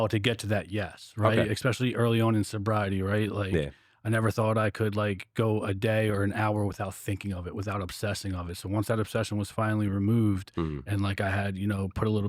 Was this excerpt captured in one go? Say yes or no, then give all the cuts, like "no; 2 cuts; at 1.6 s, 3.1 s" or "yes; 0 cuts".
yes; 0 cuts